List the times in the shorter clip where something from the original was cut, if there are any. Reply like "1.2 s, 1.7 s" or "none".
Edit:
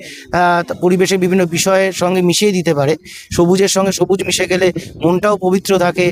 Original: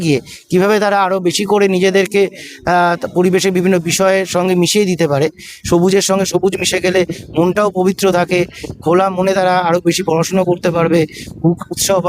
none

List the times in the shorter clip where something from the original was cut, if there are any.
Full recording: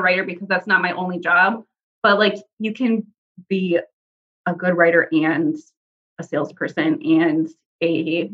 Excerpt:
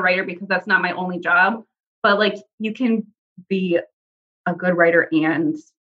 none

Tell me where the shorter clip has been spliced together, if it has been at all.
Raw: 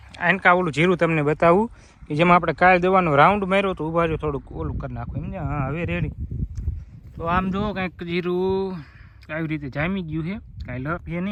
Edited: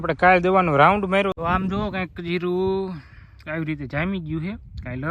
1.4 s

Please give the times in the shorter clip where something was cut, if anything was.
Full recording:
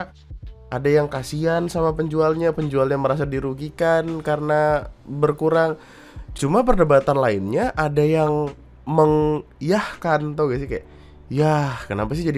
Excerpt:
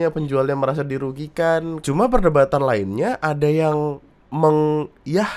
1.7 s

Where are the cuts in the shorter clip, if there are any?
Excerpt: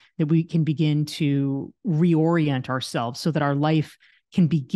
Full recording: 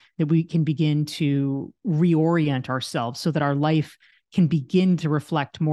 none

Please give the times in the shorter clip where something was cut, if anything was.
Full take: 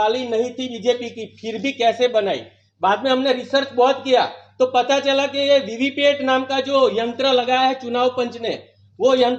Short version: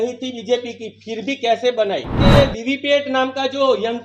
2.2 s

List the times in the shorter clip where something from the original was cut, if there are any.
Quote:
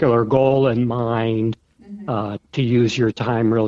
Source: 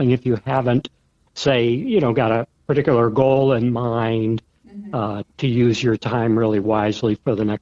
none

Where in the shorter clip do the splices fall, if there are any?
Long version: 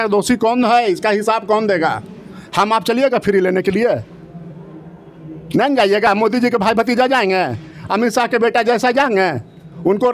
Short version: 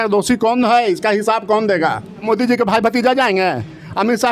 2.2 s

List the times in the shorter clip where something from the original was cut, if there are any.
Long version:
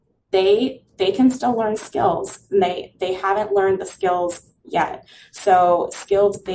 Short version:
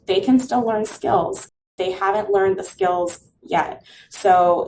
1.5 s

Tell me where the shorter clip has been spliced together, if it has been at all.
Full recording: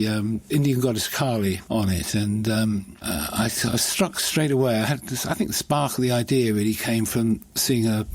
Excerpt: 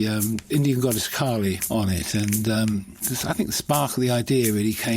3.0 s

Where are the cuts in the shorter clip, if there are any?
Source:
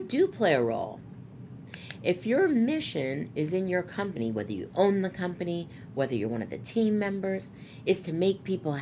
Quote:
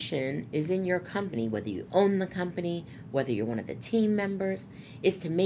none

